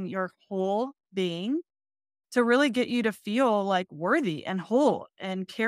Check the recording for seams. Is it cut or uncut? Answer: uncut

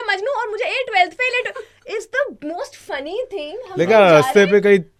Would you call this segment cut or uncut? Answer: uncut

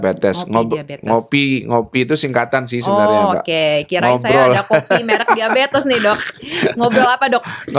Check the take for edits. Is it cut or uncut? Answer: uncut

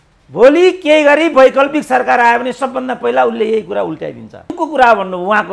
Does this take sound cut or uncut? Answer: cut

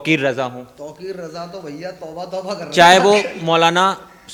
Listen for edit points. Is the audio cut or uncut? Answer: uncut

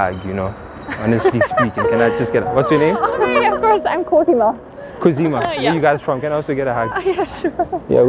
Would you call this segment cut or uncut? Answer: uncut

